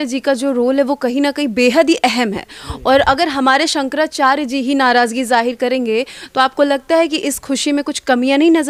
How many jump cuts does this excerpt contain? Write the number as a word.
zero